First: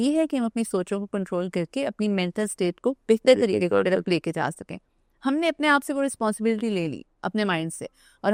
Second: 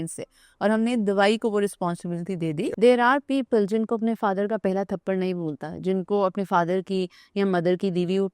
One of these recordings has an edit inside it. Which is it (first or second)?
second